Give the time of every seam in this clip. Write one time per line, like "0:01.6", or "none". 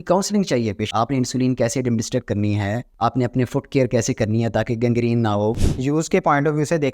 0:02.9
0:05.6